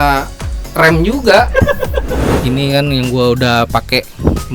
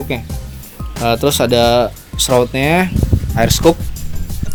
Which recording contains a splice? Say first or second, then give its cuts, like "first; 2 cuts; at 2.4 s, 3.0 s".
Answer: first; 1 cut; at 2.2 s